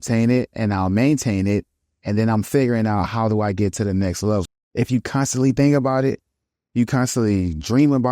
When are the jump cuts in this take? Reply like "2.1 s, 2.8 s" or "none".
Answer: 4.4 s